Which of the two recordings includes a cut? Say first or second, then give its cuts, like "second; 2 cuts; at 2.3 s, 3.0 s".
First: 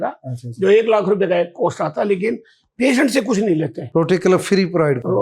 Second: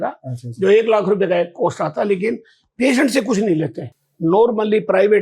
second; 1 cut; at 3.8 s